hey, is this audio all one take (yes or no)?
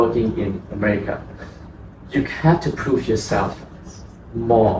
yes